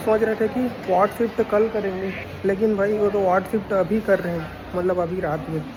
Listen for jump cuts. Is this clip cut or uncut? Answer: uncut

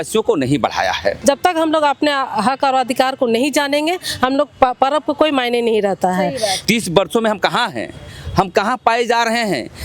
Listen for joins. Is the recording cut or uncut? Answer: cut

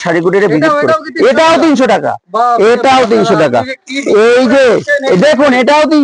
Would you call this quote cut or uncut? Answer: uncut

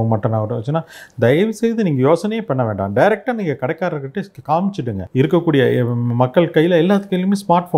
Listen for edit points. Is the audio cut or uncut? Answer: cut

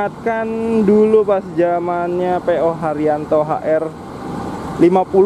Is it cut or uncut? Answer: uncut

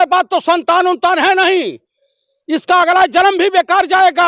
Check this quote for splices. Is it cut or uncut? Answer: uncut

